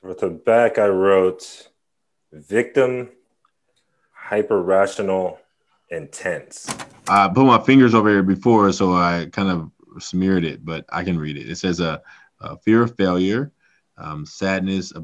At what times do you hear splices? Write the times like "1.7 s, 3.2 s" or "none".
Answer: 6.9 s

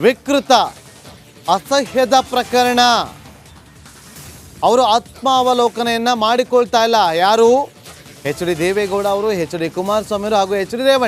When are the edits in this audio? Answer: 8.7 s

